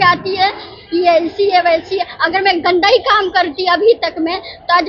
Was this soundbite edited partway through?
no; 0 cuts

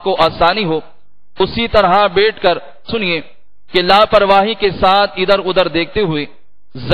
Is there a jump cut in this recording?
yes; 1 cut; at 2.9 s

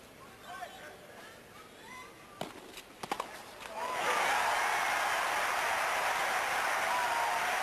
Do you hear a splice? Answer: no; 0 cuts

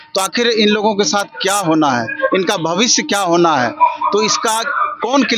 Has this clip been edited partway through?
no; 0 cuts

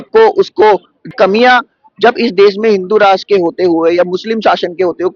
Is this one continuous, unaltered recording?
no; 1 cut; at 1.1 s

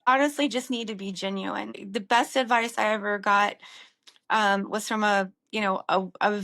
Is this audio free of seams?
no; 1 cut; at 1.7 s

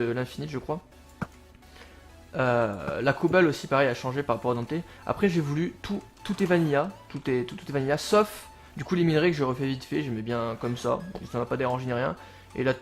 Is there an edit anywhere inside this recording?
yes; 1 cut; at 4.1 s

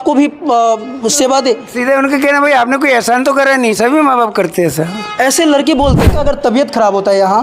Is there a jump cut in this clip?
yes; 1 cut; at 6.1 s

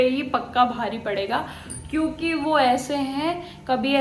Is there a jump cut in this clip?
no; 0 cuts

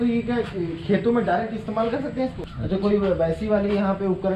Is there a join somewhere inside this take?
yes; 1 cut; at 2.4 s

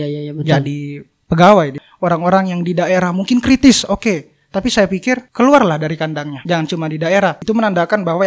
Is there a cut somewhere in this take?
yes; 4 cuts; at 1.8 s, 5.3 s, 6.3 s, 7.4 s

